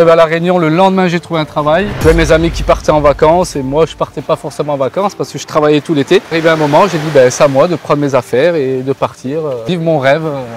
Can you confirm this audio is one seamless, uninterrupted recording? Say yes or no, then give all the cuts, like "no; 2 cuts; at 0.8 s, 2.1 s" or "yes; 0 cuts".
no; 3 cuts; at 1.9 s, 6.3 s, 9.6 s